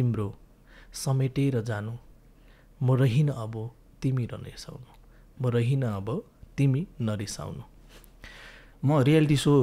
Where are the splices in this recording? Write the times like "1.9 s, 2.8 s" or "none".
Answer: 8.6 s

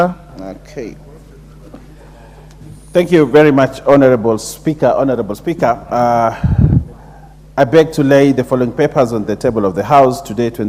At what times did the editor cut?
none

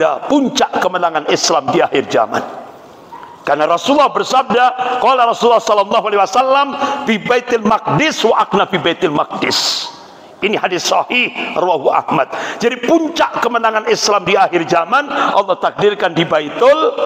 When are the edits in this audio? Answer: none

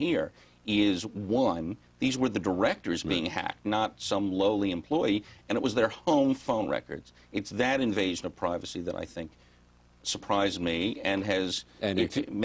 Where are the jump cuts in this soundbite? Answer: none

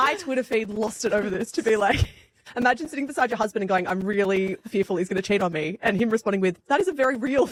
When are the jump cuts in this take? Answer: none

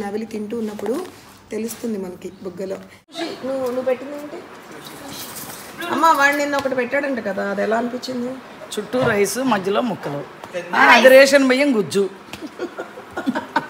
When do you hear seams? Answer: 3.1 s

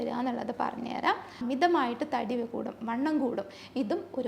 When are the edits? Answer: 1.3 s

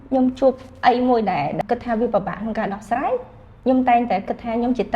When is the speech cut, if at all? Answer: 1.6 s

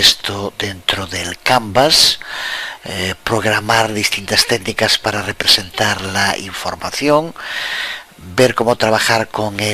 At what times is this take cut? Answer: 4.2 s

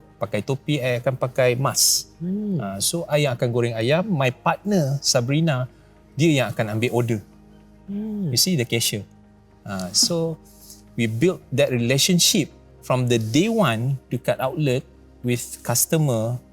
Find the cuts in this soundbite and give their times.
none

